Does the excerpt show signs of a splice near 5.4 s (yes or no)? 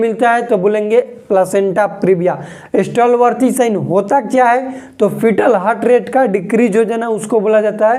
no